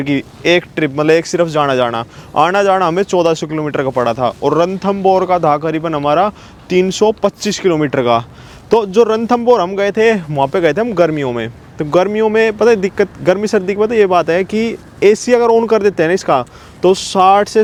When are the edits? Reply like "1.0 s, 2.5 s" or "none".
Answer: none